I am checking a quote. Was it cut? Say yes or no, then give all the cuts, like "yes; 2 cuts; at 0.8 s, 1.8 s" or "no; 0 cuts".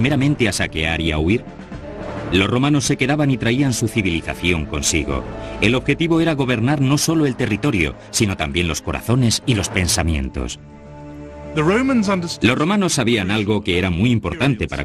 no; 0 cuts